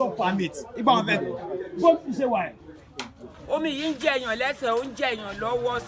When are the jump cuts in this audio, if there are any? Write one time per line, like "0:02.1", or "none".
0:03.3